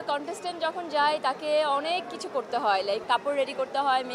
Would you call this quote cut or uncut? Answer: uncut